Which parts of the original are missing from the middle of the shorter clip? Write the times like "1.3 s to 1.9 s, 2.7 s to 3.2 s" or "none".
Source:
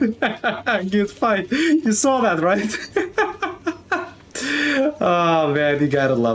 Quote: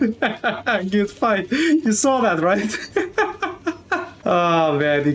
4.2 s to 5.0 s